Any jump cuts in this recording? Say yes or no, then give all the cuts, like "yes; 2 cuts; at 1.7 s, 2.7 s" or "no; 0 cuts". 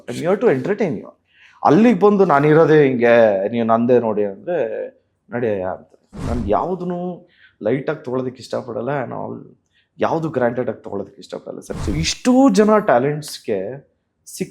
yes; 2 cuts; at 6.1 s, 11.7 s